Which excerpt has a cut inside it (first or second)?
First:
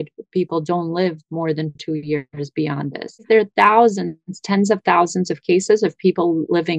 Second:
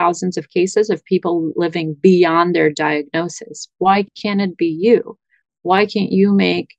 first